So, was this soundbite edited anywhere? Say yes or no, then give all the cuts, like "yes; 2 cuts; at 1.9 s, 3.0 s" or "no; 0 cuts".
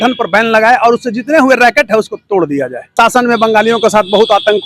yes; 1 cut; at 2.8 s